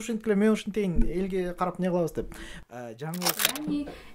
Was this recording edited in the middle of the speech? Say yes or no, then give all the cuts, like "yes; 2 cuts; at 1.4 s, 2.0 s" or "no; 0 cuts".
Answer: yes; 1 cut; at 3.2 s